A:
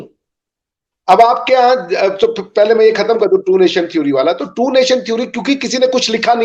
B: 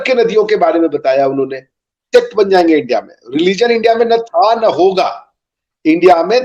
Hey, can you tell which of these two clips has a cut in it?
B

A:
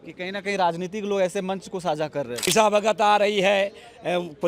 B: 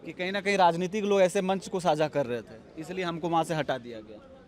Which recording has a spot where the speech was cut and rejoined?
A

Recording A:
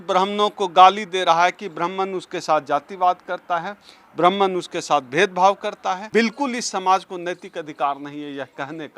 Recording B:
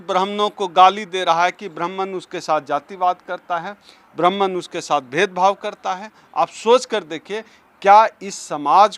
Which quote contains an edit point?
A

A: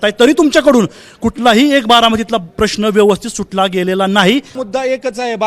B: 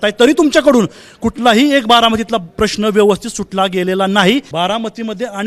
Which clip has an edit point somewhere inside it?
A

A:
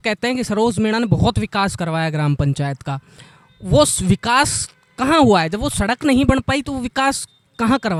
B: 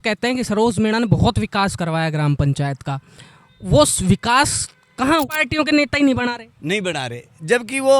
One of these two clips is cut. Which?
B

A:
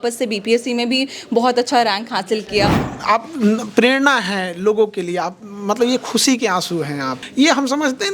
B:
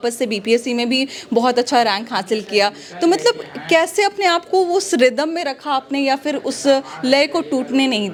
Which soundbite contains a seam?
A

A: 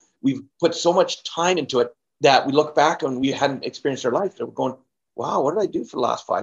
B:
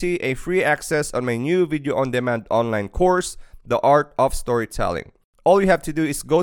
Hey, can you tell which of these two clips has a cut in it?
A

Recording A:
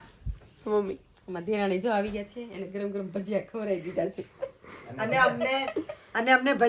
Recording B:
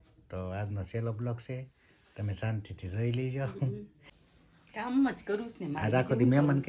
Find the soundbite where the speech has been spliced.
B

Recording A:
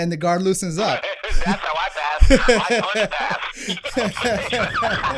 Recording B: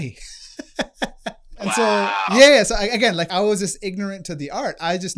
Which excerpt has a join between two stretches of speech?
B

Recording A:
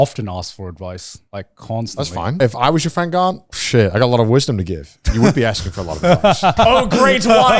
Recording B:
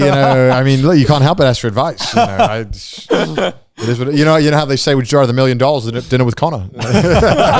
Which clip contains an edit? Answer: A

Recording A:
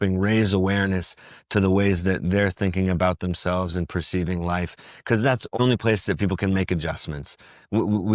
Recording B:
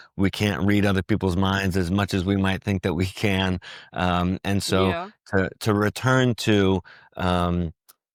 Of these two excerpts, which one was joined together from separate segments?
A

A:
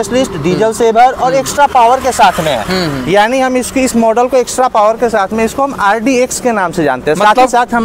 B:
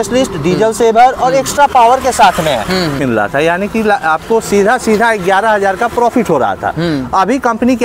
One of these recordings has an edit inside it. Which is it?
B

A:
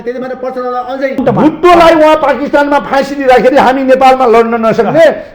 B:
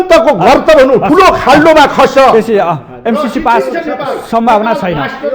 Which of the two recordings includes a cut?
A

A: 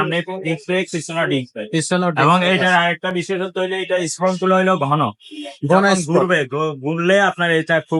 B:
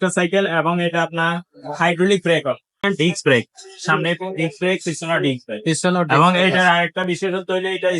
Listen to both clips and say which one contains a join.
B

